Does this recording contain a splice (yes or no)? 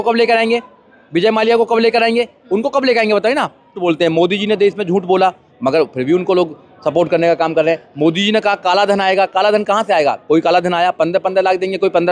yes